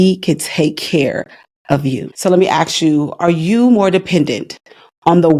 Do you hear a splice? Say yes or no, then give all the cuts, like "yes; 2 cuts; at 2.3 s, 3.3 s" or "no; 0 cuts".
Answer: yes; 1 cut; at 2.1 s